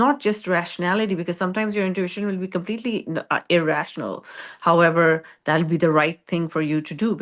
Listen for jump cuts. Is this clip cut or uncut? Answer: uncut